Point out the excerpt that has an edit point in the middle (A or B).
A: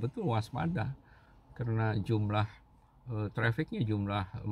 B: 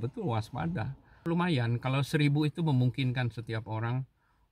B